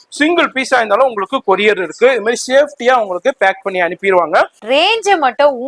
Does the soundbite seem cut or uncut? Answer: cut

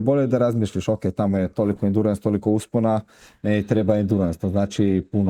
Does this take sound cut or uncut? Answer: uncut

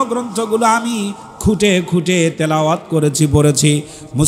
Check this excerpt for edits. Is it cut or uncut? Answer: uncut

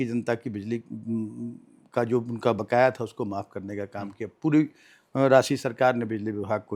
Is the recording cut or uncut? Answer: uncut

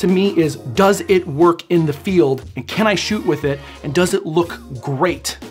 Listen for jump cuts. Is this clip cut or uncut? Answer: uncut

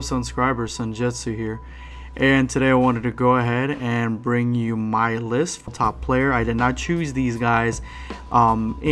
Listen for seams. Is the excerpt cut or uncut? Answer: uncut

